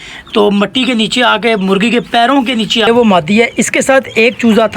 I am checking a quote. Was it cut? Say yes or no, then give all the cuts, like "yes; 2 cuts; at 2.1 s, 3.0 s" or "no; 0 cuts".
yes; 1 cut; at 2.9 s